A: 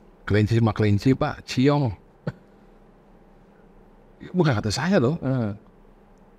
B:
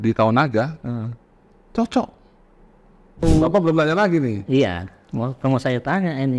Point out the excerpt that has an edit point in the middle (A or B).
B